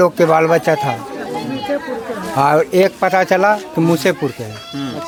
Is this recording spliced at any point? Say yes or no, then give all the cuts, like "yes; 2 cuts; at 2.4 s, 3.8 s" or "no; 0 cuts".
no; 0 cuts